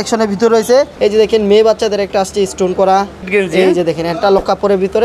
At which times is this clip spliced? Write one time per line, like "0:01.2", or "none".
0:00.9
0:03.3